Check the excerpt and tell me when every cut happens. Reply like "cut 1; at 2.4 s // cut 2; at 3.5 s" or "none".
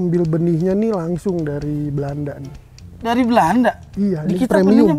none